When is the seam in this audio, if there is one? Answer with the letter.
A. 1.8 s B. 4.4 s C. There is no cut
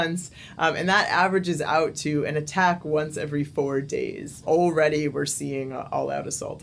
B